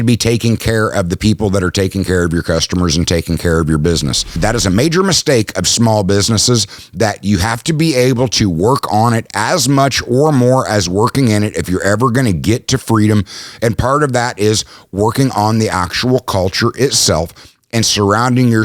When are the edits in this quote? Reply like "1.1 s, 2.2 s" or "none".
4.4 s